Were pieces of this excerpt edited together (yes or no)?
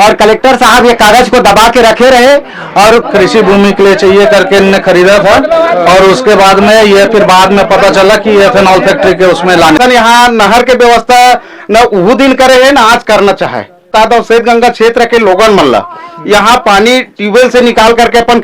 yes